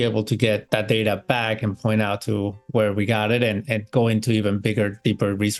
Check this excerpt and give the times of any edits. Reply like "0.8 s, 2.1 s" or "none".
none